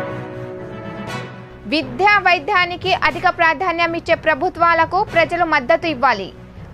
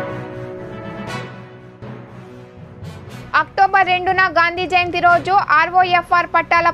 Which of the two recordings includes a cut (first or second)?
first